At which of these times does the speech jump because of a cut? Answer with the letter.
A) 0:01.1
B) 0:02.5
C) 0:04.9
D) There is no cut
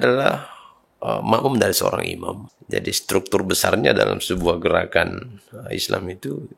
B